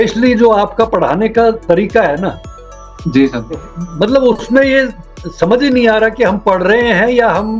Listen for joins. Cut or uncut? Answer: uncut